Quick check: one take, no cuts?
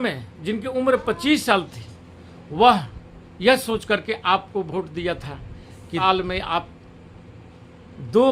no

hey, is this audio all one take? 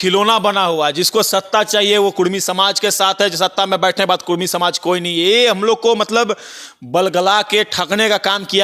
yes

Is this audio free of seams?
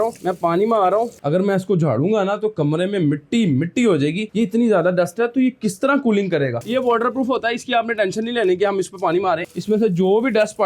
no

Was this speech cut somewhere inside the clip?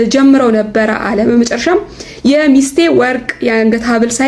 no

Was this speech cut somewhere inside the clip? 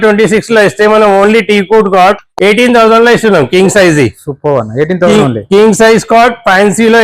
no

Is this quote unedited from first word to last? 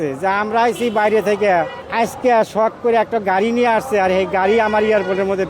no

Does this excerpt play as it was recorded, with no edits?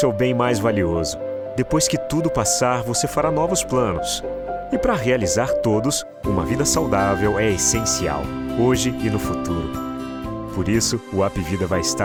yes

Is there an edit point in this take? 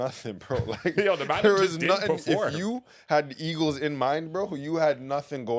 no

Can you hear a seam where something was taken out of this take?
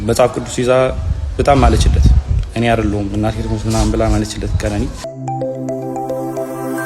yes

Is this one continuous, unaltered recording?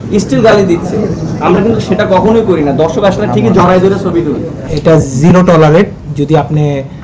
no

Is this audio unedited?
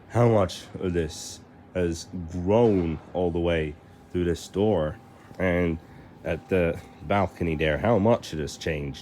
yes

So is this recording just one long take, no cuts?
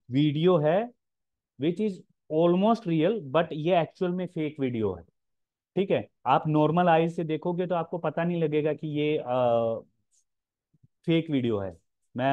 yes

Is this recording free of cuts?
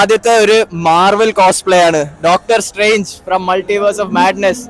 yes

